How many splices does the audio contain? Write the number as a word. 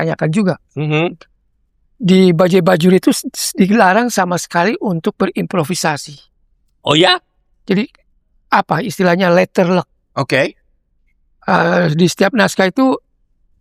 zero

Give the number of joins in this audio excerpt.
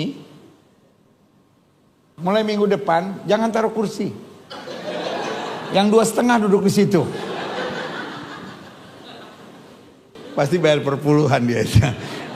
one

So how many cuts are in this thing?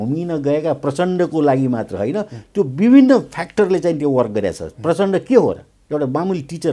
zero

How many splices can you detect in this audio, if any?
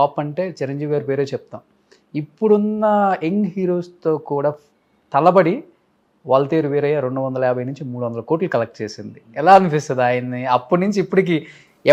zero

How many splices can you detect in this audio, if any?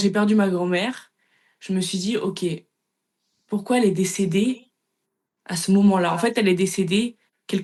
zero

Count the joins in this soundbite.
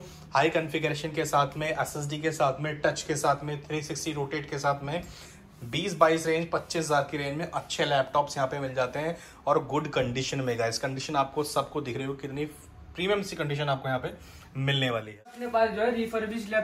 one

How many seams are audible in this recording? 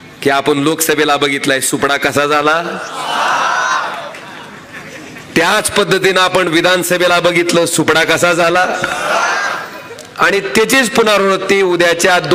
zero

